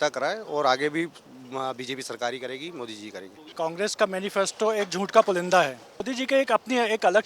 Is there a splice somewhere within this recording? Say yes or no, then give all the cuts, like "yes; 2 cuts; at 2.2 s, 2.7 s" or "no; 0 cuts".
yes; 2 cuts; at 3.5 s, 6.0 s